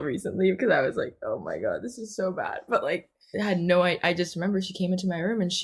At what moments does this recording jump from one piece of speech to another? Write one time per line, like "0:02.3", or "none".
0:03.0